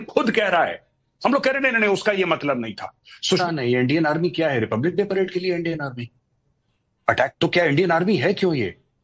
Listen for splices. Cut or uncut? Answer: cut